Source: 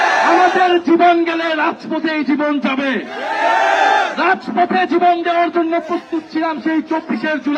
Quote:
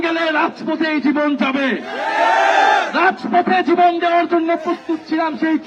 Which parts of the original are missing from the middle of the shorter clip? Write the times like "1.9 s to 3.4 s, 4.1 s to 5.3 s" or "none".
none